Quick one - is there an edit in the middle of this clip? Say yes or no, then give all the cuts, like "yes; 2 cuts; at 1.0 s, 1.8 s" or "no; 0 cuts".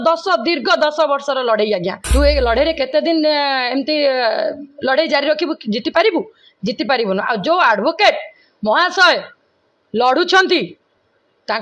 yes; 1 cut; at 2.0 s